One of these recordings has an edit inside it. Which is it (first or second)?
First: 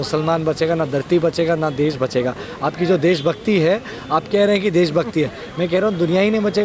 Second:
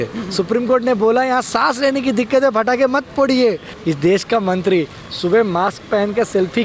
second